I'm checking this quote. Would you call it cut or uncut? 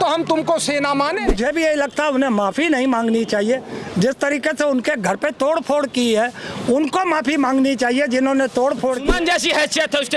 cut